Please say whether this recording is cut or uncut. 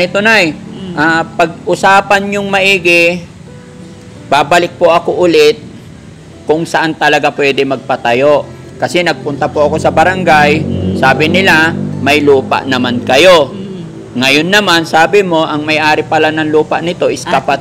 uncut